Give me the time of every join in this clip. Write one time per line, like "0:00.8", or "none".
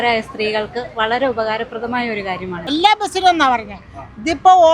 0:02.7